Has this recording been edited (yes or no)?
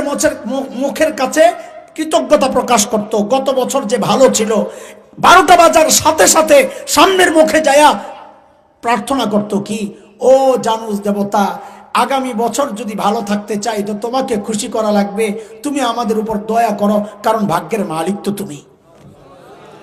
no